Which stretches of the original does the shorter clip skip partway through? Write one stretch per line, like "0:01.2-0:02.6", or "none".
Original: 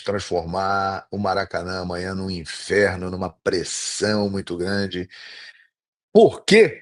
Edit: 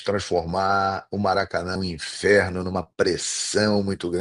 0:01.8-0:02.2